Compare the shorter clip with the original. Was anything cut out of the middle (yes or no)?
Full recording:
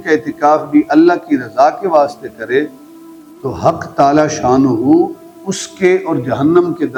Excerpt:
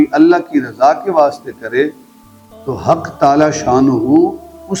no